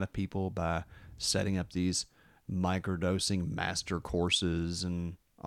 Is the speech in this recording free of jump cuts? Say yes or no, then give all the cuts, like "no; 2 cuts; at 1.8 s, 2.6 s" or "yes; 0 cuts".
yes; 0 cuts